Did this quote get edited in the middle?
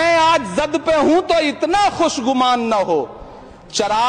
no; 0 cuts

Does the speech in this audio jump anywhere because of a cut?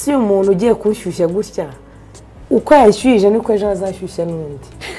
no; 0 cuts

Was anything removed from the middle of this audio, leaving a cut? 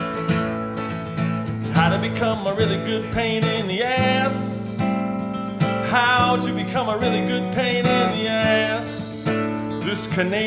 no; 0 cuts

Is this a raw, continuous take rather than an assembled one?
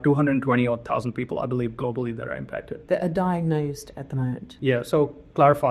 no; 2 cuts; at 2.7 s, 4.5 s

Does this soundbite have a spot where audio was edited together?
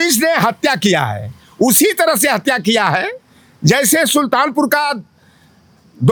no; 0 cuts

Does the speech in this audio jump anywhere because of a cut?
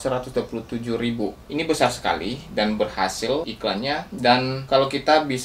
yes; 3 cuts; at 1.4 s, 3.5 s, 4.6 s

